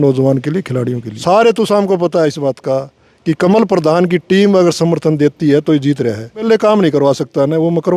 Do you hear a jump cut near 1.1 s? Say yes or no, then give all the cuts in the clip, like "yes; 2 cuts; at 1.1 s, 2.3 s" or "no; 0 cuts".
yes; 2 cuts; at 1.1 s, 6.4 s